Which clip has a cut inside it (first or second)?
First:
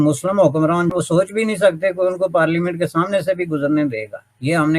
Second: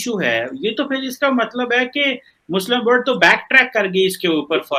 first